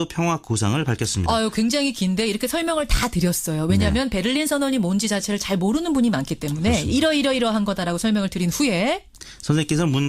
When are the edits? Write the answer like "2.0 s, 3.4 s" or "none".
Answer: 9.1 s